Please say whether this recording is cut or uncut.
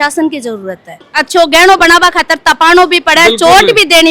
cut